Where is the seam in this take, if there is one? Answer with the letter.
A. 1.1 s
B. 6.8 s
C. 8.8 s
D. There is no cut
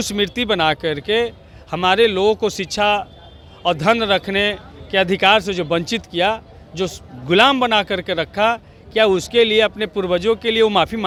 D